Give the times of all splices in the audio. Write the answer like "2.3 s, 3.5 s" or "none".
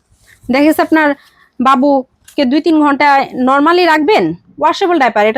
none

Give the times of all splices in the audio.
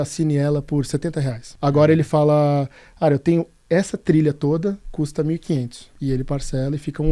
1.5 s, 5.8 s

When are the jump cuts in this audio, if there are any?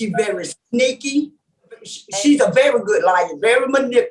2.0 s

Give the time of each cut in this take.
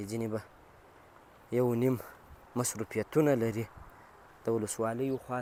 none

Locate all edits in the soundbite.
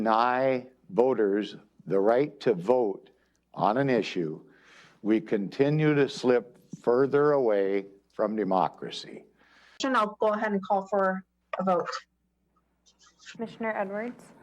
9.8 s

